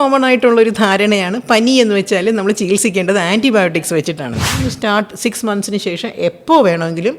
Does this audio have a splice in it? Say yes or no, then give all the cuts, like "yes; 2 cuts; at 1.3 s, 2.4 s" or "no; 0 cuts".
yes; 1 cut; at 4.6 s